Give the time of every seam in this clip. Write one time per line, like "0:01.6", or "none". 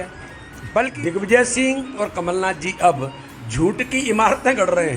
0:00.9

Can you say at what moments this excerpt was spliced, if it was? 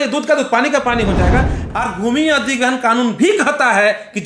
0:01.7

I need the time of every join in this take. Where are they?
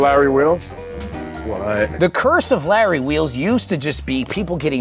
0:01.9

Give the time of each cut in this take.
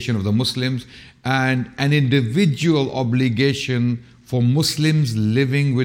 none

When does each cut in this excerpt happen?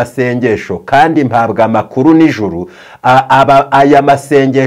none

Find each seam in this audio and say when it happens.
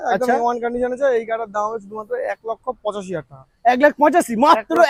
none

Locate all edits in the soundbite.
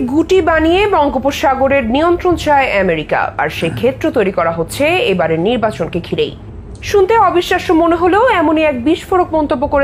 none

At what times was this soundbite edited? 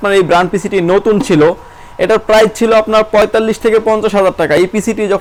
none

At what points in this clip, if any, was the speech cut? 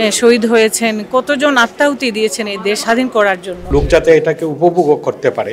0:02.8
0:03.7

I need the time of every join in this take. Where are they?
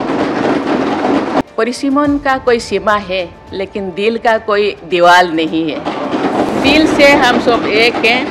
0:01.4
0:06.5

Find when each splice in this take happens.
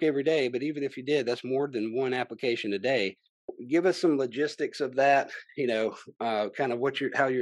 0:03.4

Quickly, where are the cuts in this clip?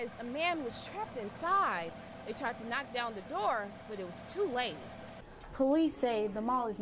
0:05.1

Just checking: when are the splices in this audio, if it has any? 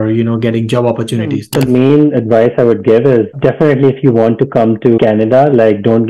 0:01.5
0:05.0

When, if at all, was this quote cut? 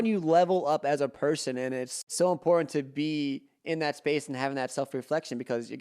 0:01.9

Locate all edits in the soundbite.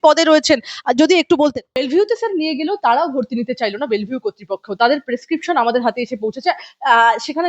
0:01.7

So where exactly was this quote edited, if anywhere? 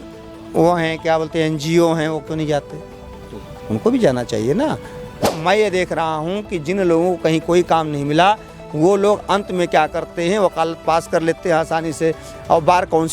0:05.3

